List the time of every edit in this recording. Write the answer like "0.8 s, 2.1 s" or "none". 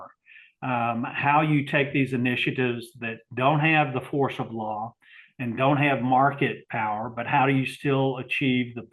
none